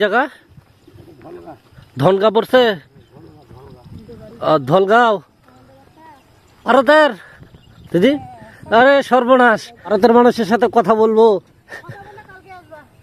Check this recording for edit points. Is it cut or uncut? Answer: cut